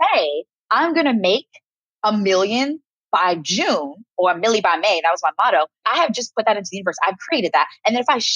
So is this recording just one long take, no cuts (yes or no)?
no